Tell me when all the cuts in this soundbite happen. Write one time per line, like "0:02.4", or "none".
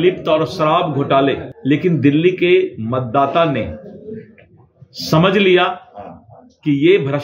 0:01.5